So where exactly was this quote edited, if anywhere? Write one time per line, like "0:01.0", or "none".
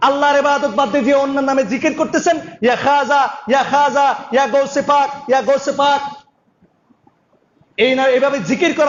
none